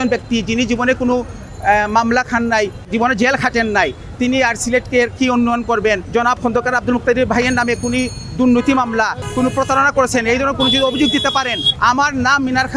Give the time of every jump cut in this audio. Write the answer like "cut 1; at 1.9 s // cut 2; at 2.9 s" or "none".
cut 1; at 2.8 s // cut 2; at 6.0 s // cut 3; at 9.2 s // cut 4; at 11.6 s